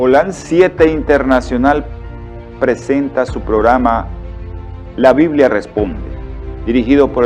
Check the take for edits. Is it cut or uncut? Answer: cut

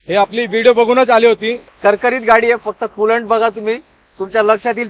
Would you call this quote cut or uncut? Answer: cut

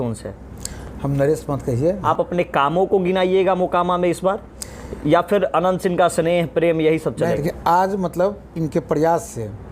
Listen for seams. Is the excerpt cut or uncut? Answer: cut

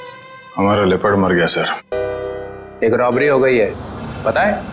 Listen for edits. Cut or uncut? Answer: cut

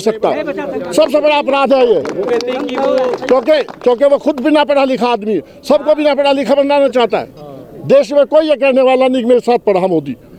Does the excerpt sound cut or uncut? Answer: uncut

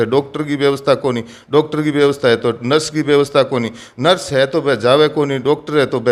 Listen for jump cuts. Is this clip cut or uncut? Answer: uncut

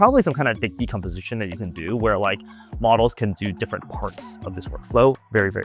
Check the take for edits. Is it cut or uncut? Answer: uncut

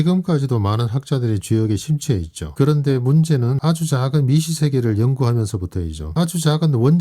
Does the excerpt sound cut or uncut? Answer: cut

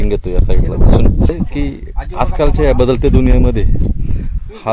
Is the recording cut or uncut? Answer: cut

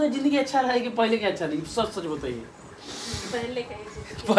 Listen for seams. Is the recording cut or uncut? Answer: uncut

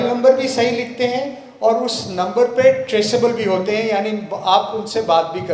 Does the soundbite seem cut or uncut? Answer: uncut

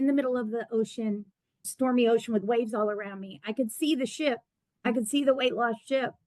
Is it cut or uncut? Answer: cut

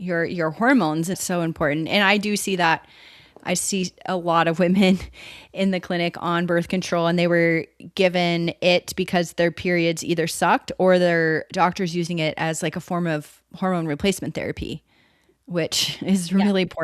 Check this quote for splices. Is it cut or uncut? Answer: cut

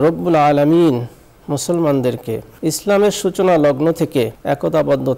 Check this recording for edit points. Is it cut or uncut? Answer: cut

